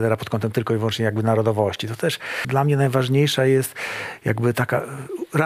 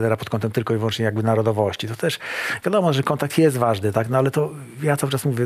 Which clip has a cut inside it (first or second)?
first